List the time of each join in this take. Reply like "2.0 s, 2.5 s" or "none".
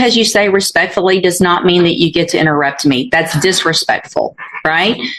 none